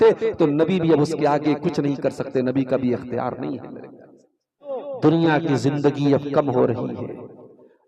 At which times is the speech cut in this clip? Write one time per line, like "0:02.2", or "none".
0:04.8